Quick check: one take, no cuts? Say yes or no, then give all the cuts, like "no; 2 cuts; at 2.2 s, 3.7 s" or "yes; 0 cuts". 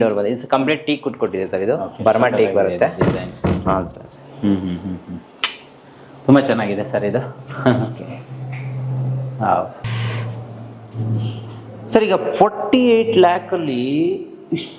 yes; 0 cuts